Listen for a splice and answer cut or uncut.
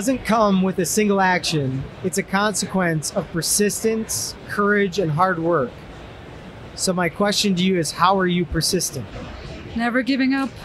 uncut